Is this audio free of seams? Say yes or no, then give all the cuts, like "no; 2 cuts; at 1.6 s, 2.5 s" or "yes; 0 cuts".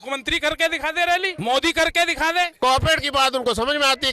no; 2 cuts; at 1.3 s, 2.5 s